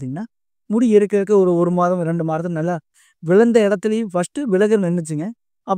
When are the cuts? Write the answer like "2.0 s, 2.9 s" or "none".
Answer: none

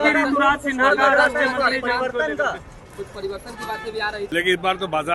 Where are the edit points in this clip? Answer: 4.2 s

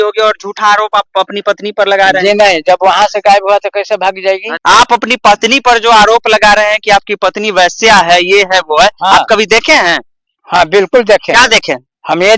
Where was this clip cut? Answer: 4.5 s

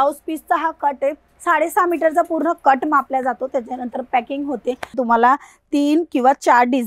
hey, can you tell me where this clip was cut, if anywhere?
1.3 s, 5.0 s

